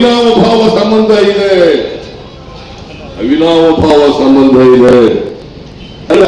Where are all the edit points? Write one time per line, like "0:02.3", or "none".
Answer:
none